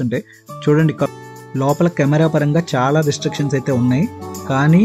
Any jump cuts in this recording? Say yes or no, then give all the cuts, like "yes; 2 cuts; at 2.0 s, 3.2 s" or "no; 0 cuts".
yes; 1 cut; at 1.1 s